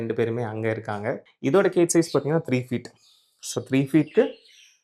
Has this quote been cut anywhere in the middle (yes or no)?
yes